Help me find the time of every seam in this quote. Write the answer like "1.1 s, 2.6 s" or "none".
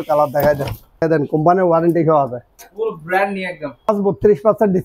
1.0 s, 3.9 s